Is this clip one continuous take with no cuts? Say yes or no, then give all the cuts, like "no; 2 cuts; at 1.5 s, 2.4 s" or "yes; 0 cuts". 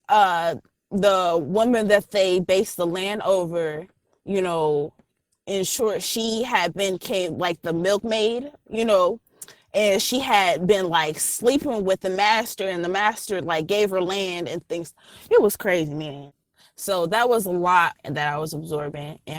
no; 2 cuts; at 16.3 s, 17.9 s